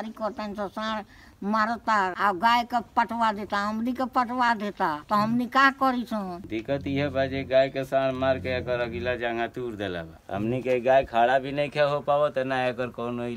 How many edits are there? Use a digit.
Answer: 2